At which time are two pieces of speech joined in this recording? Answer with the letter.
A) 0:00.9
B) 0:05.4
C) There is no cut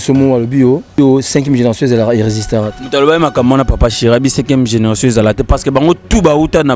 A